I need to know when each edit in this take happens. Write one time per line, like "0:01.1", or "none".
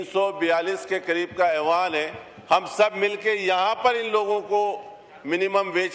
none